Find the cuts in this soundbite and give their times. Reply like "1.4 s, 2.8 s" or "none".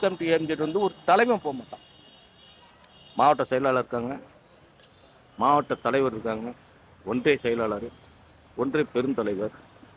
none